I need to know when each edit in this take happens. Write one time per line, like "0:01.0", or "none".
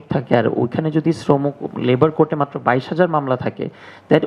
none